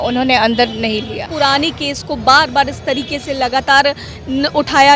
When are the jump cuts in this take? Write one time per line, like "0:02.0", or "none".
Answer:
0:01.3